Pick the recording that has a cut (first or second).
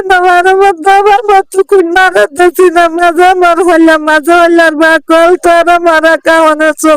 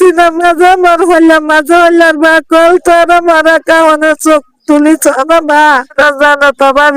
second